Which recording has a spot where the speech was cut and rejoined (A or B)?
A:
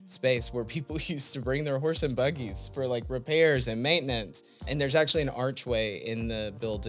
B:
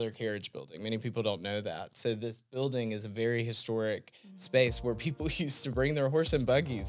A